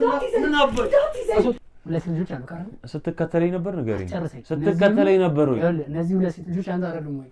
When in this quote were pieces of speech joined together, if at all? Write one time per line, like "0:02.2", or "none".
0:01.7